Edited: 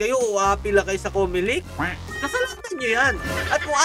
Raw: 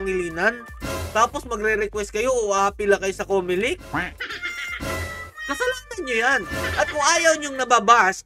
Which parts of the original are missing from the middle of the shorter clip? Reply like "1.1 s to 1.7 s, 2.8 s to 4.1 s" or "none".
4.2 s to 5.3 s